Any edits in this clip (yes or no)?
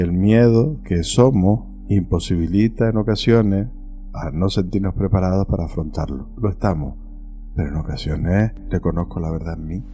yes